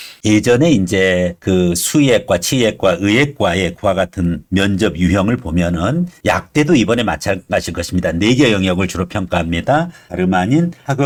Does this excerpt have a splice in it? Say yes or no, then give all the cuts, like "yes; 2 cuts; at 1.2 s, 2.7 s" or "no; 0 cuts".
no; 0 cuts